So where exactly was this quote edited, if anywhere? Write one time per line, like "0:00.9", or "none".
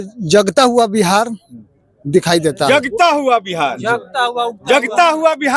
none